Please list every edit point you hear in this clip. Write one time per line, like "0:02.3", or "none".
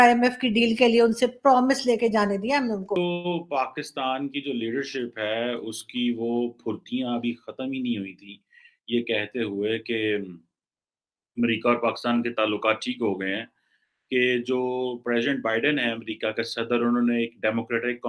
0:02.9

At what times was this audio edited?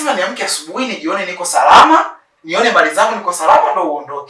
none

